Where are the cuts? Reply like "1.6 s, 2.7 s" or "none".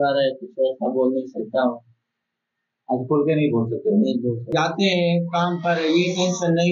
4.5 s